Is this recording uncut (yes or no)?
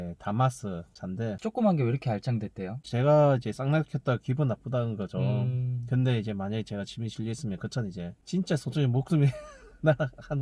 yes